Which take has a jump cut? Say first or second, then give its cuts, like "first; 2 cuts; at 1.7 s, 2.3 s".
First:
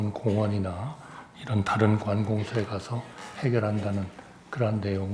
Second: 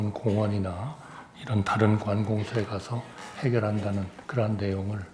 second; 1 cut; at 4.2 s